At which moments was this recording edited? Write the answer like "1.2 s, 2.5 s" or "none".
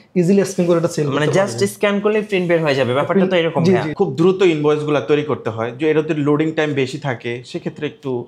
3.9 s